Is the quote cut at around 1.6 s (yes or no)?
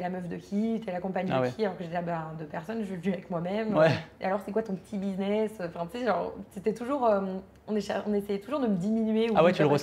no